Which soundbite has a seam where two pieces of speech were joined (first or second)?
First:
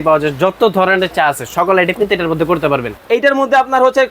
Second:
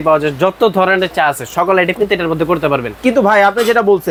first